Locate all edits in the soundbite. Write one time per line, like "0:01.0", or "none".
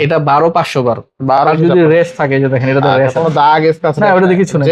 0:01.4